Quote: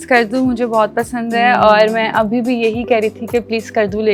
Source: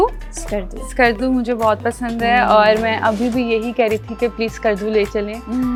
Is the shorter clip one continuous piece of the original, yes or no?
yes